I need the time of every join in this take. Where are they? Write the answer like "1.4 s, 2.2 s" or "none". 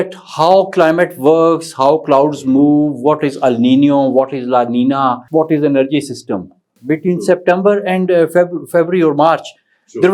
5.2 s, 6.8 s